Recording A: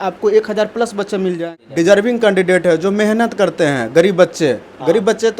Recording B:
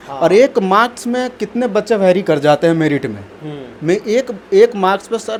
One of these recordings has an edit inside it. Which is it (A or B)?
A